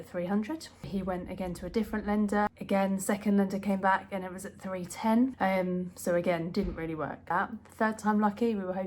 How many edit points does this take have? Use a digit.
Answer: 4